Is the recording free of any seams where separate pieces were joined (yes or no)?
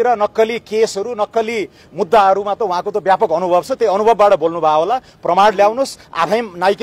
yes